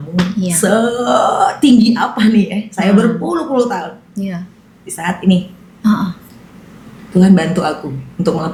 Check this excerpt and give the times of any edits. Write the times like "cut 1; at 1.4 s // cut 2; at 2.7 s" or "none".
none